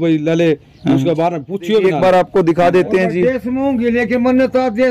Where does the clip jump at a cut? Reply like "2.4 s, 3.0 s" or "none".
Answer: 1.9 s